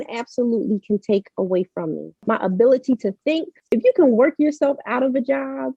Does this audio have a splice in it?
yes; 2 cuts; at 2.2 s, 3.7 s

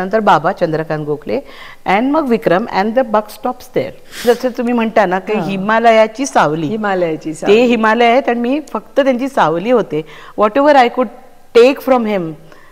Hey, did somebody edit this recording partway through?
yes; 1 cut; at 4.2 s

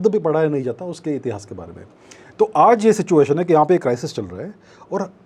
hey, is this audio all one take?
yes; 0 cuts

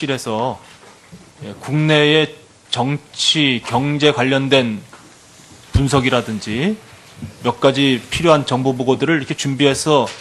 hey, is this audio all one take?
yes; 0 cuts

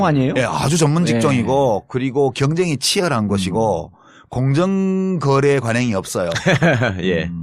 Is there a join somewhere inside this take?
yes; 1 cut; at 3.7 s

